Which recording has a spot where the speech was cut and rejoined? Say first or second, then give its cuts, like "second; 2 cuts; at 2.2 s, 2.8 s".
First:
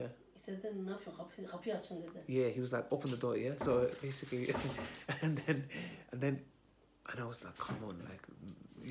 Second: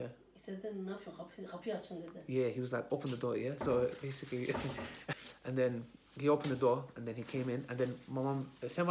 second; 1 cut; at 5.0 s